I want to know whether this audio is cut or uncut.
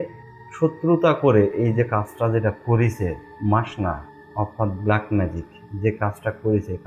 uncut